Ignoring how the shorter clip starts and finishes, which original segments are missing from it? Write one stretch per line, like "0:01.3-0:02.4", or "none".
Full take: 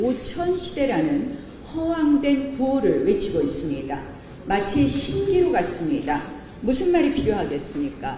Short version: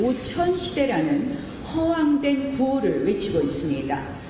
none